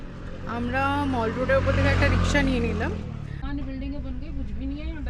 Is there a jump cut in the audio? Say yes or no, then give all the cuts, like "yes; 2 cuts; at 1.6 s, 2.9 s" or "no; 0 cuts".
yes; 1 cut; at 3.3 s